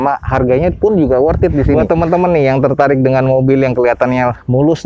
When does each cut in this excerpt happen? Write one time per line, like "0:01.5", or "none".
0:01.8